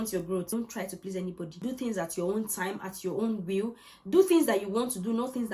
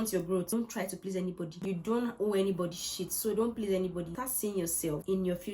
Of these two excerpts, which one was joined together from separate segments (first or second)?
second